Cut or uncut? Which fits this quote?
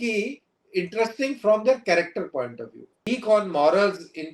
cut